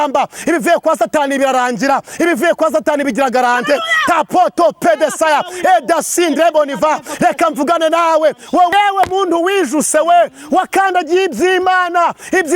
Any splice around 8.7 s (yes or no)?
yes